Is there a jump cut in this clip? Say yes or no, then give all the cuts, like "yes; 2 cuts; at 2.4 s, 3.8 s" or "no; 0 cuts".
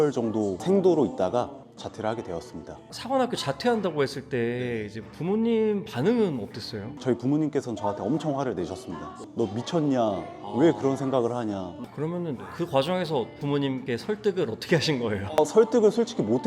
no; 0 cuts